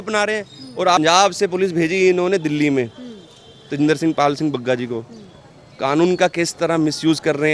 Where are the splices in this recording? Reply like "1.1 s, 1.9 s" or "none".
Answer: 1.0 s